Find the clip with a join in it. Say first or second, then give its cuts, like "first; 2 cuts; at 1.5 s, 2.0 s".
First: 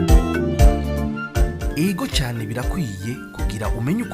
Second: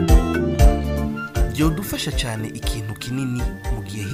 first; 1 cut; at 1.3 s